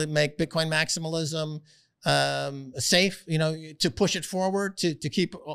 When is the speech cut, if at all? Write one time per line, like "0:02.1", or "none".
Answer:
none